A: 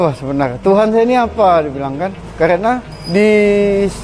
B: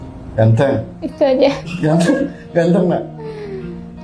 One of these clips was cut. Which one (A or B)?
A